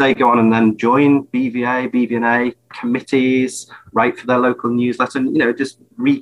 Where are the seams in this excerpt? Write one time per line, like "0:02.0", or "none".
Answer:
none